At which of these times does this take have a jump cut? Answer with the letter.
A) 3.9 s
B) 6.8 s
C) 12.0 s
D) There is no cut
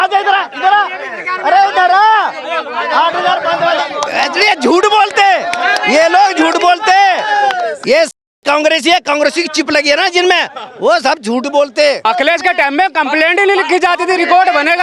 C